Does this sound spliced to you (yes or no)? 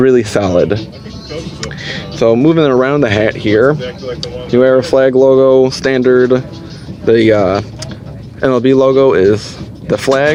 no